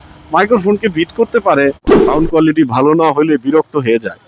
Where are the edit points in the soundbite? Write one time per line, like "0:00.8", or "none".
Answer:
0:01.8